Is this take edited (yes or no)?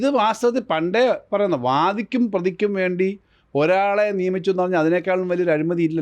no